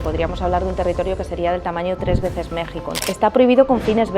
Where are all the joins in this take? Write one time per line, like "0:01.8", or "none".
0:03.0